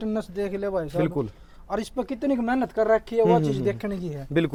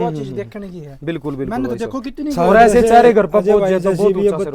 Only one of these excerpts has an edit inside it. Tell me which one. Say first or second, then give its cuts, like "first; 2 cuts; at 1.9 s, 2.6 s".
second; 1 cut; at 2.3 s